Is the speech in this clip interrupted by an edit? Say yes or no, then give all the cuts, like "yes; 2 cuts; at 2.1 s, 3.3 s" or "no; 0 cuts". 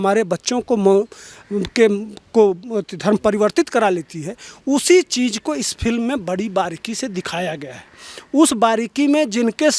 no; 0 cuts